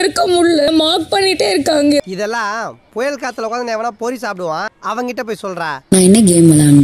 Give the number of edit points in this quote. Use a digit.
2